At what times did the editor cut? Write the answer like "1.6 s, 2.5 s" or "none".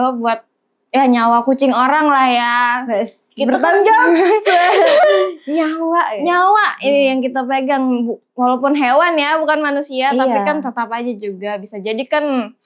none